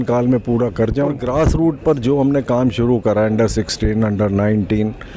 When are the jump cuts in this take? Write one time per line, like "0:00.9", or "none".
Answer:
0:01.2